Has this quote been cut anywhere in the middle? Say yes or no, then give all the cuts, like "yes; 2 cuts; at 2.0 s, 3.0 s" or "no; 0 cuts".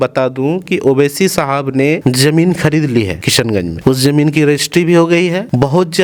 no; 0 cuts